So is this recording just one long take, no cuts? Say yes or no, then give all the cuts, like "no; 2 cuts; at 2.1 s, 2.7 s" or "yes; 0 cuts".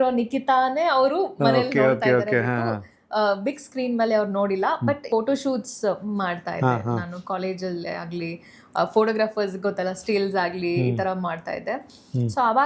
no; 1 cut; at 5.1 s